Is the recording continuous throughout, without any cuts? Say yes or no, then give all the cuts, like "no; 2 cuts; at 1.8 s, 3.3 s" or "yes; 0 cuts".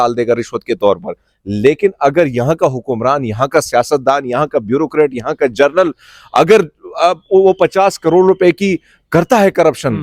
yes; 0 cuts